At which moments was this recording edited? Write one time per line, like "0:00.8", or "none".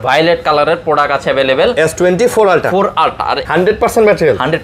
0:03.4